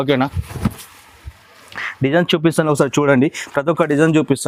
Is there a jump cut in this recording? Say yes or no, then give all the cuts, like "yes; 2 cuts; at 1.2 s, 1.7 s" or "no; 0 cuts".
no; 0 cuts